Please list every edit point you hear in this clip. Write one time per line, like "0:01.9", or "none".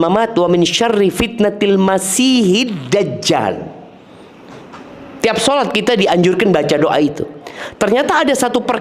none